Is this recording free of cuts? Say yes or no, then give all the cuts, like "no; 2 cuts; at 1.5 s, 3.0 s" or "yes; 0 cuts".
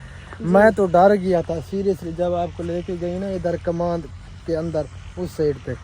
yes; 0 cuts